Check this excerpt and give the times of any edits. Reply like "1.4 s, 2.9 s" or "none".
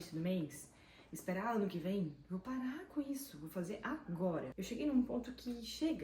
4.5 s